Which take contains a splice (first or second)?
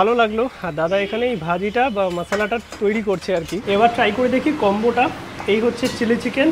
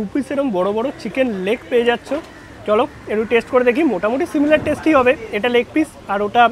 first